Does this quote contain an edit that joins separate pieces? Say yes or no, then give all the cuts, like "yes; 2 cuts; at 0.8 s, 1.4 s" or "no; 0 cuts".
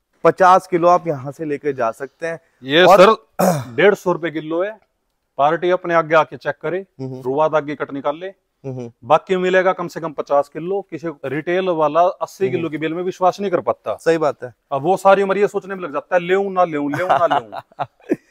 yes; 1 cut; at 11.1 s